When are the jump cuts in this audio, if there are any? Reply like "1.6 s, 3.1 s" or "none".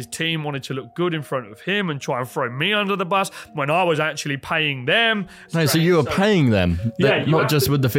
5.4 s

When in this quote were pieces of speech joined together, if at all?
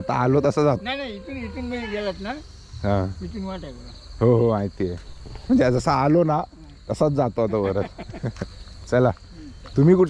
none

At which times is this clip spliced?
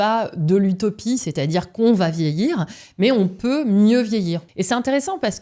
4.5 s

